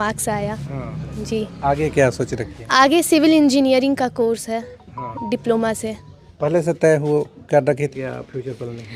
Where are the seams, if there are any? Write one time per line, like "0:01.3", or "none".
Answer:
0:07.9